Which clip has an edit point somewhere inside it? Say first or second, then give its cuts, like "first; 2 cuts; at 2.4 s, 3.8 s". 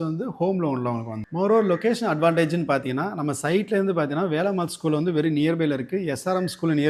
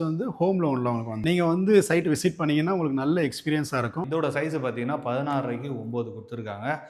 second; 2 cuts; at 1.2 s, 4.1 s